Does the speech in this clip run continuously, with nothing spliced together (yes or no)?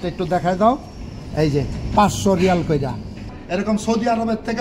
no